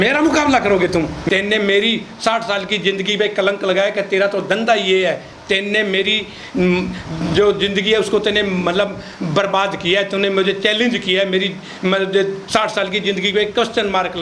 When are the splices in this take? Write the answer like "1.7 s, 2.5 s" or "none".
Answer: 1.2 s